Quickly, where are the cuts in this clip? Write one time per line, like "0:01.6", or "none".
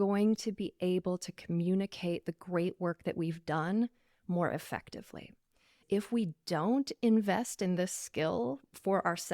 0:05.8